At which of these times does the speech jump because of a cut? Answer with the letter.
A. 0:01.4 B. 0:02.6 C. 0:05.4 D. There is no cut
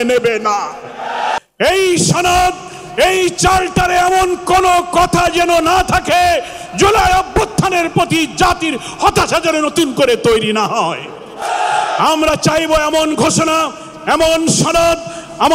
A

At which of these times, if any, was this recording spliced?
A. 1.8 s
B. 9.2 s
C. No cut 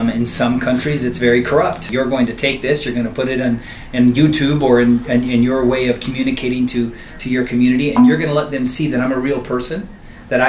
A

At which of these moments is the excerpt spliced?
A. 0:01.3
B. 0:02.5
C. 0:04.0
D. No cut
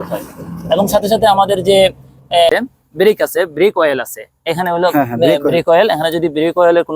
B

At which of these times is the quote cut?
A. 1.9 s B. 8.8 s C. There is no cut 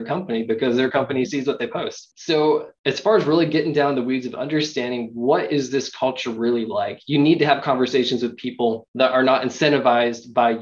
B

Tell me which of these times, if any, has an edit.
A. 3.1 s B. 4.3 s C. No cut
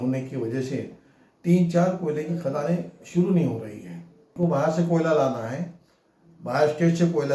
B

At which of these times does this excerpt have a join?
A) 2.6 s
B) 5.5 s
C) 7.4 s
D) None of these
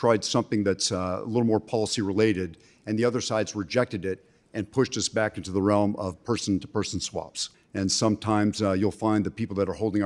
C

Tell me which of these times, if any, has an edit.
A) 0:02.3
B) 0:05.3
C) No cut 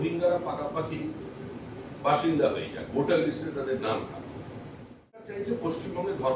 B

